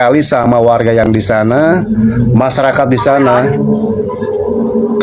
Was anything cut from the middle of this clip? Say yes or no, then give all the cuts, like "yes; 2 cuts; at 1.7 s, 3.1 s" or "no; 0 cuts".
no; 0 cuts